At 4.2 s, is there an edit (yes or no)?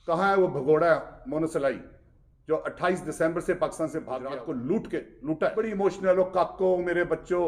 yes